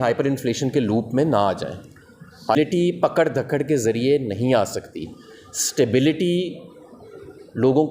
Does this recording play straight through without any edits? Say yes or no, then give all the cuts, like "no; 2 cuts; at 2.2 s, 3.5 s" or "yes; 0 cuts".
no; 1 cut; at 2.5 s